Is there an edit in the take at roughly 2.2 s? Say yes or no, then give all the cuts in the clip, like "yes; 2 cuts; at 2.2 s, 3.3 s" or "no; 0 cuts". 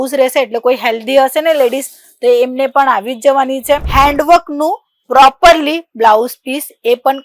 no; 1 cut; at 3.9 s